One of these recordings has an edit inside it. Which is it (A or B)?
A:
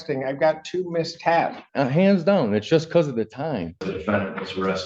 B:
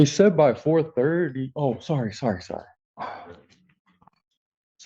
A